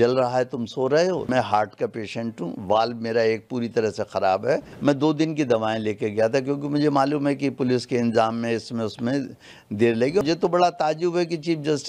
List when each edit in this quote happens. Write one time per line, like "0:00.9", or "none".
0:01.3
0:04.7
0:10.2

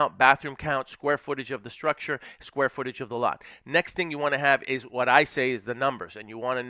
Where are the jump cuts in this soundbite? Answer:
none

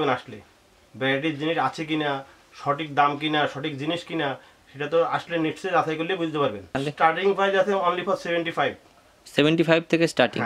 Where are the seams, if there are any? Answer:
0:06.7

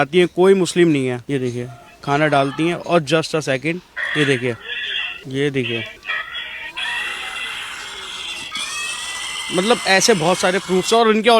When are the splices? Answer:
none

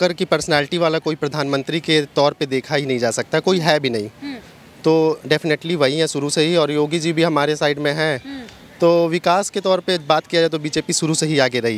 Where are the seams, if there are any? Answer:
none

